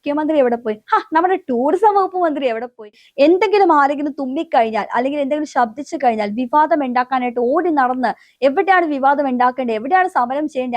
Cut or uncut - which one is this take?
cut